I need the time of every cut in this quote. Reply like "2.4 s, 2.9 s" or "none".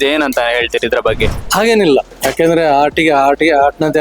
1.4 s, 2.2 s

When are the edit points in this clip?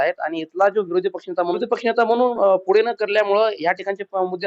1.6 s

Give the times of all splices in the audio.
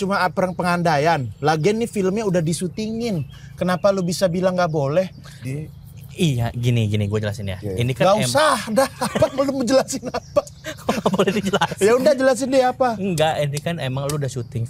none

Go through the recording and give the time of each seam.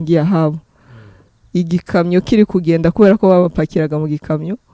none

